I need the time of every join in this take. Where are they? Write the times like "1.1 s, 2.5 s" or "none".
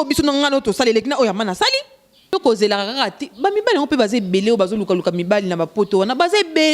2.3 s